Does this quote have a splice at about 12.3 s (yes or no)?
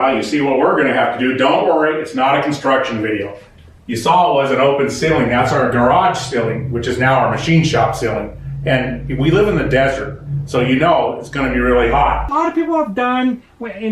yes